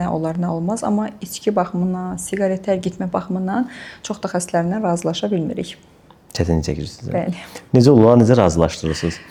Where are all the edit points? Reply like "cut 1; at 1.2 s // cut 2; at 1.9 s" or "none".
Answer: none